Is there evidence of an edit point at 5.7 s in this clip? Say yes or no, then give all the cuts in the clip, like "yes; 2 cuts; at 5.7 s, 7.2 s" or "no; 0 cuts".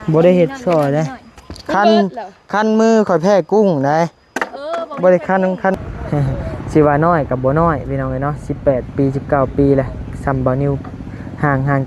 yes; 1 cut; at 5.7 s